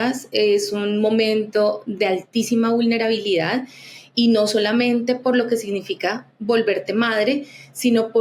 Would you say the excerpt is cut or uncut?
uncut